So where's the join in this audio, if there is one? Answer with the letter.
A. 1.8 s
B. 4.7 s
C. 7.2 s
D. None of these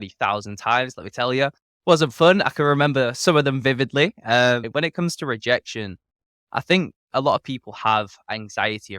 B